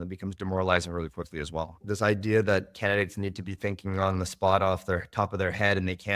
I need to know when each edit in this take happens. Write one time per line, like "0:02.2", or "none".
0:01.8